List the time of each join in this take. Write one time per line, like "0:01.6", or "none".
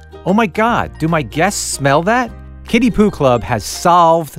none